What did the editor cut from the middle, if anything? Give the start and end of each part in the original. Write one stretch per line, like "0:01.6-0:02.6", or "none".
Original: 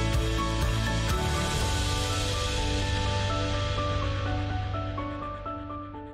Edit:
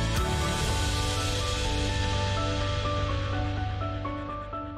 none